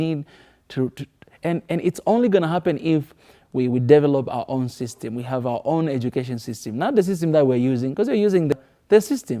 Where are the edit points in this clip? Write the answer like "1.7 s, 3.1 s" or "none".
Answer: 8.5 s